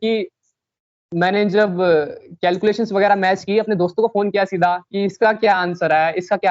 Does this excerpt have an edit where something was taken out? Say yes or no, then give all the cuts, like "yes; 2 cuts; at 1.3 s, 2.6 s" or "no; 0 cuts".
no; 0 cuts